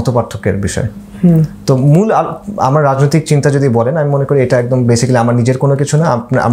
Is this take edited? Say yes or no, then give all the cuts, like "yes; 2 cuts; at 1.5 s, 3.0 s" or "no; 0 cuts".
no; 0 cuts